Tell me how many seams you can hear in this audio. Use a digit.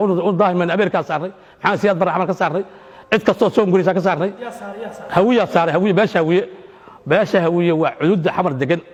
0